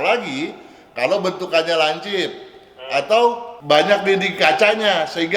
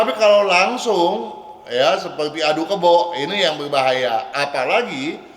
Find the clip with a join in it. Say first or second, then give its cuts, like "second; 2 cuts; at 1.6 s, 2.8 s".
first; 1 cut; at 3.6 s